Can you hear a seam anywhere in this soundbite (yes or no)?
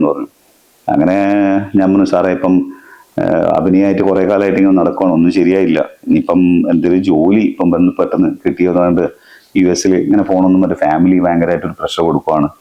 no